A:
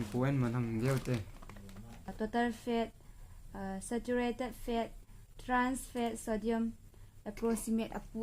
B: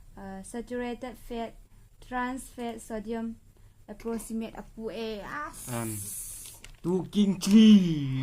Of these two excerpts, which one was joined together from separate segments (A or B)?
A